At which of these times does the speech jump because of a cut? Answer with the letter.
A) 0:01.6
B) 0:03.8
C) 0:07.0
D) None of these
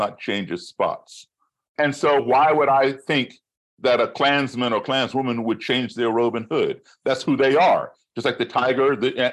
A